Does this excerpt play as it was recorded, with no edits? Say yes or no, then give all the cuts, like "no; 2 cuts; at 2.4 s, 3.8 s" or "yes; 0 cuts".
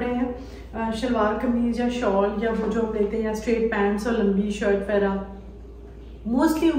yes; 0 cuts